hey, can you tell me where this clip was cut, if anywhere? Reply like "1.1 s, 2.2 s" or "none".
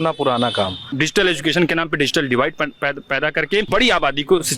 0.8 s, 3.7 s

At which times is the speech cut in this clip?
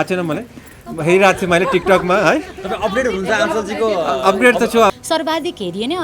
4.9 s

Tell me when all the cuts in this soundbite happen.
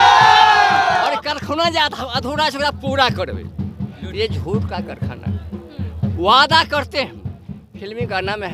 none

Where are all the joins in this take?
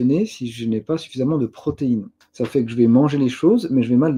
2.2 s

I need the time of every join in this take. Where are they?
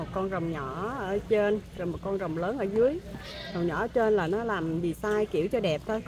none

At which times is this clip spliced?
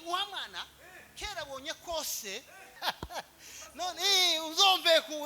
2.6 s

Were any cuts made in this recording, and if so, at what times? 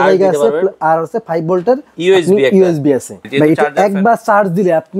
1.9 s, 3.2 s

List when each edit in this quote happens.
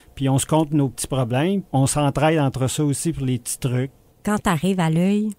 1.7 s, 4.0 s

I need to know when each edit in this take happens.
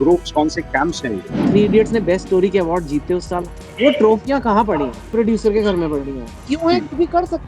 1.4 s, 3.6 s, 5.1 s, 6.4 s

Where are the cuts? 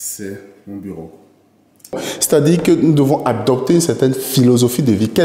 2.1 s

